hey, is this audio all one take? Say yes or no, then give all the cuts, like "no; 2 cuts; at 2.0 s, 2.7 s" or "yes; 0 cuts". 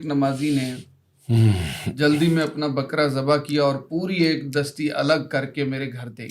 yes; 0 cuts